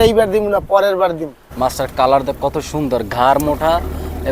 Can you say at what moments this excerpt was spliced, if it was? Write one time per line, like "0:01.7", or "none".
0:01.4